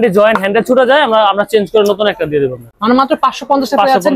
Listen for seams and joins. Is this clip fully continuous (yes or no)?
yes